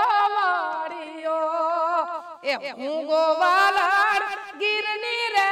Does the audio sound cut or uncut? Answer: uncut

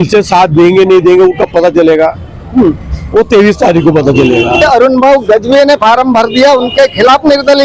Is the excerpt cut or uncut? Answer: cut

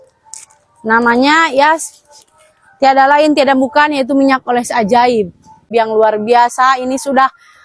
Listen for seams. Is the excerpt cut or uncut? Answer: cut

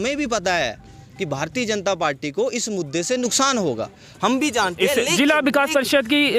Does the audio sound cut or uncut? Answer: uncut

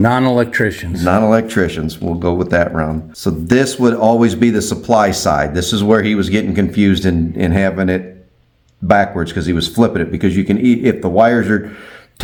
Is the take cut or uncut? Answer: uncut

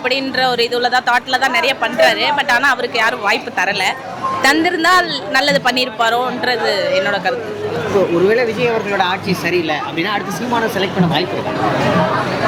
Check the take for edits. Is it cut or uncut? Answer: uncut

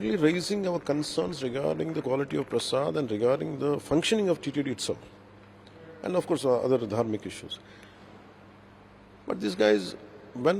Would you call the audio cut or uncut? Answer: uncut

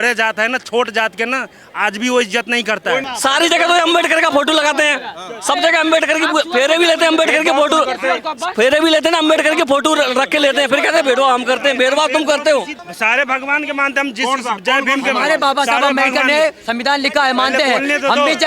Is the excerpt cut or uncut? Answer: cut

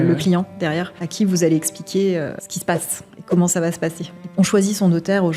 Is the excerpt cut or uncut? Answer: cut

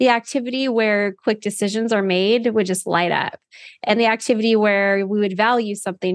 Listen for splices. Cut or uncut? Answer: uncut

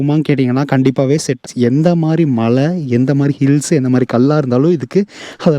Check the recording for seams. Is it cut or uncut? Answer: cut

